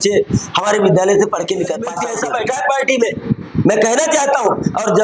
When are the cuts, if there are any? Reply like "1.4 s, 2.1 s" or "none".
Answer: 2.0 s